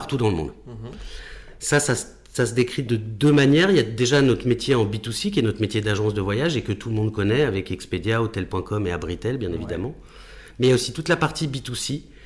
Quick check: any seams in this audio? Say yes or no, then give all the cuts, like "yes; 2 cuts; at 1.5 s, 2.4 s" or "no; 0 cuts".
no; 0 cuts